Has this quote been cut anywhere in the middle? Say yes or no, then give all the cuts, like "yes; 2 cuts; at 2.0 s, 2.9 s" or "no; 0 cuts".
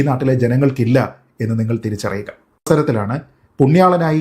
yes; 1 cut; at 2.6 s